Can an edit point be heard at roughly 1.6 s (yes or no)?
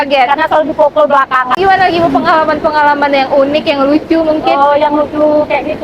yes